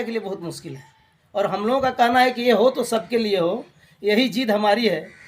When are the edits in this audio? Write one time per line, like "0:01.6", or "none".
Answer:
0:01.2